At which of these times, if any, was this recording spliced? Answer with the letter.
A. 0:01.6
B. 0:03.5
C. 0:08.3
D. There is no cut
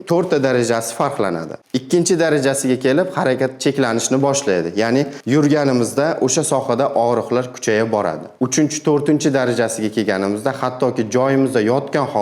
A